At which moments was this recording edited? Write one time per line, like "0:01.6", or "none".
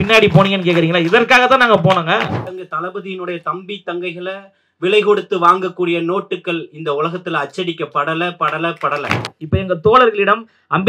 0:02.5
0:09.3